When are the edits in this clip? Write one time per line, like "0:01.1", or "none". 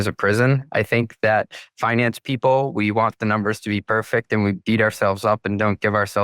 none